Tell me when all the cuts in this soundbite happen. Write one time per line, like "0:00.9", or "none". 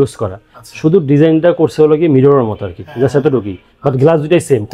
none